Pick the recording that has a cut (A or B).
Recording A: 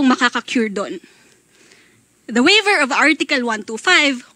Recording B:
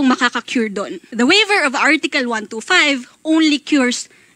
B